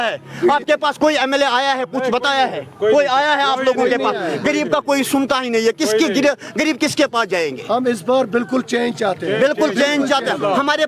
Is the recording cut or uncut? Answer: uncut